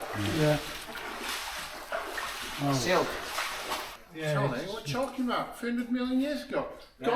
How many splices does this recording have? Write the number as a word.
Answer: one